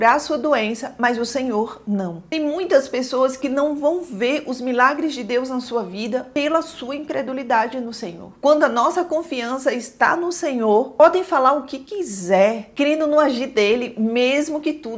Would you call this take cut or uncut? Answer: cut